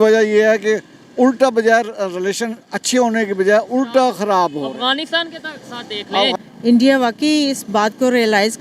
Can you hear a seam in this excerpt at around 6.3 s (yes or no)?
yes